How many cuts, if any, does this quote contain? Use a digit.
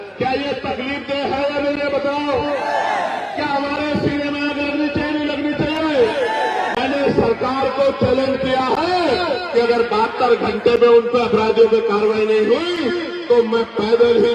0